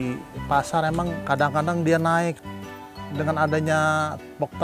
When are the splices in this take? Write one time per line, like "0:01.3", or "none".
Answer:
0:01.2
0:02.9